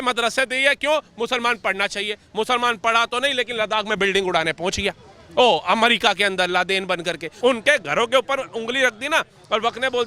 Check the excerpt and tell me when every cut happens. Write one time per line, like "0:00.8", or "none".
0:07.3